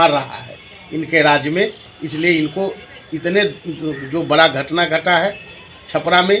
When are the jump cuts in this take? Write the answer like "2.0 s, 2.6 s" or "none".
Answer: none